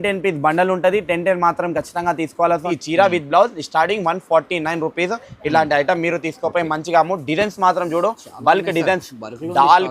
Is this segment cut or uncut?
cut